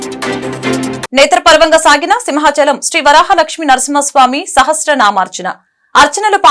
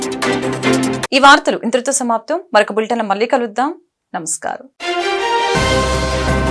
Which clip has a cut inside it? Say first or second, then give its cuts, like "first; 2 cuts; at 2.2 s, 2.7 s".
first; 1 cut; at 1.0 s